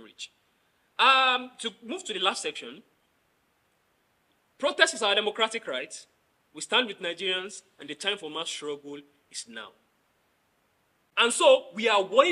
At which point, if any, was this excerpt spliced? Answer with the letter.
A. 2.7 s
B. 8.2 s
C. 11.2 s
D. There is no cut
C